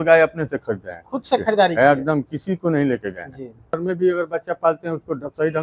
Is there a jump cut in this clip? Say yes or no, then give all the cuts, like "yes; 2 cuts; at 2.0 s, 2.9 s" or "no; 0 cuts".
yes; 1 cut; at 3.8 s